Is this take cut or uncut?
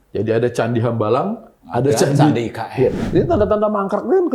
cut